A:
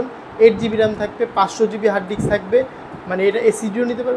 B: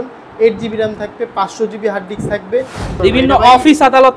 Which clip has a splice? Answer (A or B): B